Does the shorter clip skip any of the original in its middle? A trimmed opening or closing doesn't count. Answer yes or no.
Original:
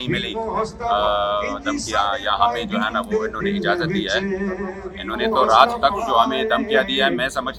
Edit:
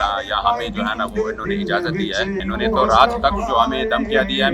yes